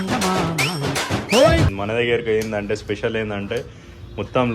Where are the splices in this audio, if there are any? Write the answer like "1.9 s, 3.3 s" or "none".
1.7 s